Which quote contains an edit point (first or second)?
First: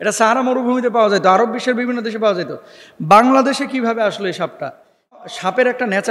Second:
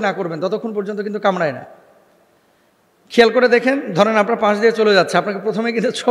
first